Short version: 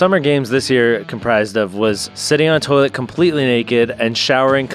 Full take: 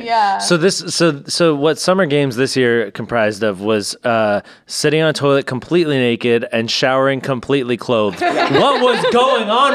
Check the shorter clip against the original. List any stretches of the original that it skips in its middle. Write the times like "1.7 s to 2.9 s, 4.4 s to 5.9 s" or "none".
3.9 s to 4.6 s